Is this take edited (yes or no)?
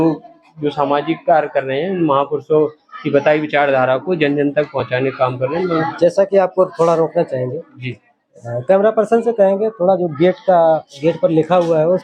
no